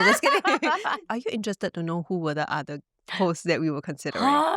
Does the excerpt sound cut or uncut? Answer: cut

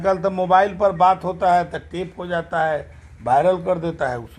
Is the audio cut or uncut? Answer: uncut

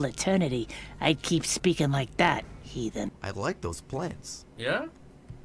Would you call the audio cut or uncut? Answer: cut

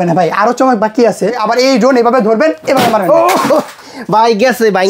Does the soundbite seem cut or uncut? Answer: cut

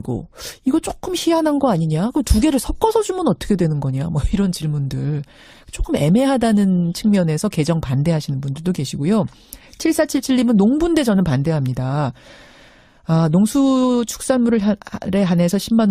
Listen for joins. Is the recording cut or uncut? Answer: uncut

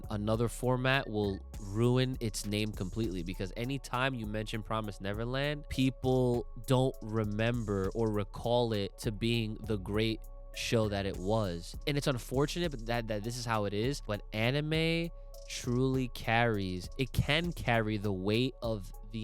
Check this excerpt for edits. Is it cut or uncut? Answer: cut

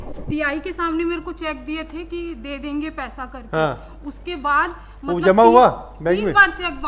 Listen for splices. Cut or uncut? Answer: uncut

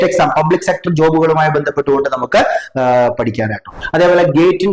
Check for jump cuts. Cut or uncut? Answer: cut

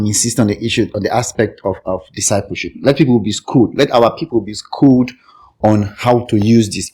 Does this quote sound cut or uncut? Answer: uncut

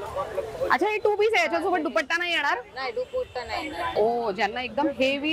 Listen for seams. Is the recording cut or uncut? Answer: cut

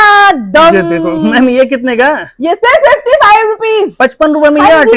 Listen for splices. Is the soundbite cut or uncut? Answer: uncut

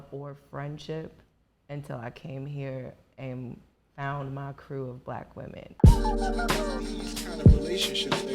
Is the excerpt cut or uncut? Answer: cut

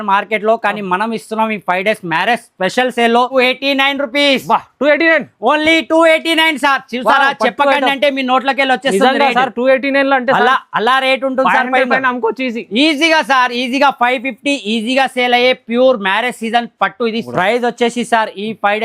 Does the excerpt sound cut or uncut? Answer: cut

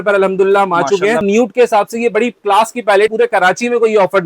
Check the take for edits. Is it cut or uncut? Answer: cut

